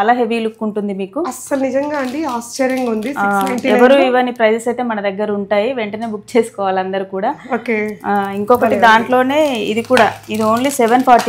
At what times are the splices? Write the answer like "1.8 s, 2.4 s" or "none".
none